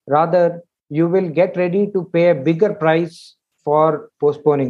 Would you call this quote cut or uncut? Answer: uncut